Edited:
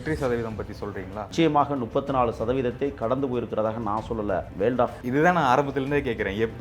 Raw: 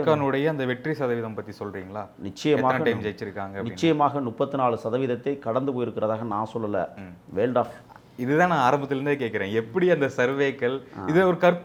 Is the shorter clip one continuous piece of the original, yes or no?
no